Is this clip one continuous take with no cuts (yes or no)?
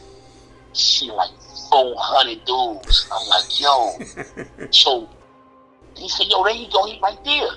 no